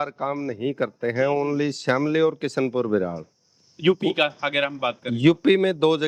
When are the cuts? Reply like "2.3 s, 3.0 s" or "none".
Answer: none